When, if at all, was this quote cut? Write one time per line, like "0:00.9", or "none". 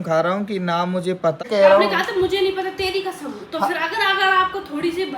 0:01.4